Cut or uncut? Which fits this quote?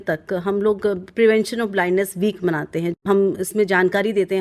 cut